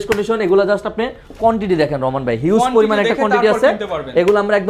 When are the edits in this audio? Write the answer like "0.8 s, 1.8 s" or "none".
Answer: none